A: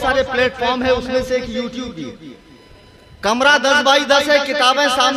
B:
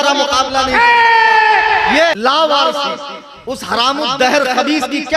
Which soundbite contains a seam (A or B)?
B